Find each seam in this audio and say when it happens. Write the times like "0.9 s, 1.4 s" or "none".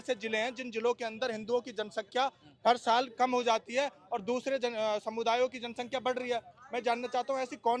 none